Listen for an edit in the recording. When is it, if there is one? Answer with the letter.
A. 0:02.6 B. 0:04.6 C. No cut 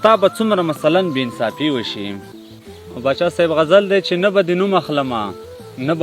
C